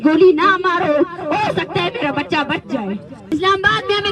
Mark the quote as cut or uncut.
cut